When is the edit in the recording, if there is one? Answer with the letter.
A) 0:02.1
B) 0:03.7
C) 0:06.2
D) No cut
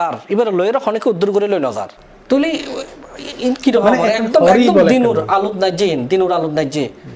D